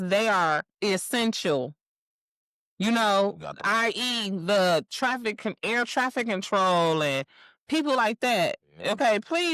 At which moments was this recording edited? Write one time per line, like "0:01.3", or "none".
none